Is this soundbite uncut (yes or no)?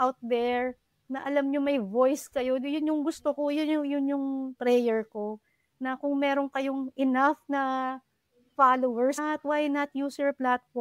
no